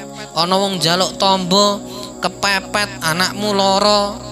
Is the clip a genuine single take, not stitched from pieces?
yes; 0 cuts

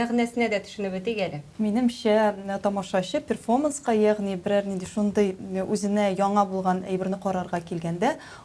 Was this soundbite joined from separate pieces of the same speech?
yes; 1 cut; at 1.4 s

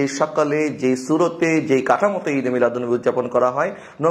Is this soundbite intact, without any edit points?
yes; 0 cuts

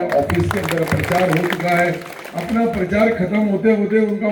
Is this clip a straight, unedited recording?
yes; 0 cuts

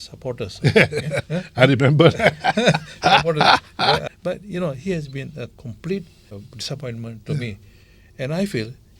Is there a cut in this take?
yes; 2 cuts; at 4.0 s, 6.4 s

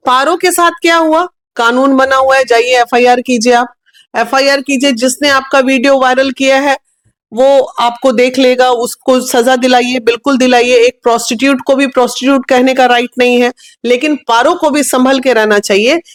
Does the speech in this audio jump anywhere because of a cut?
no; 0 cuts

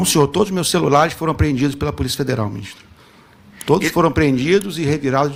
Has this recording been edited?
no; 0 cuts

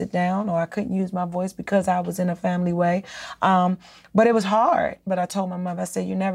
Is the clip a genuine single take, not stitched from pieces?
no; 1 cut; at 5.0 s

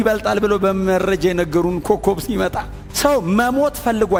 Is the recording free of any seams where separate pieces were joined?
yes; 0 cuts

